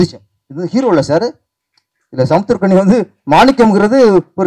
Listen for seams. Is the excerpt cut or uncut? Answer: uncut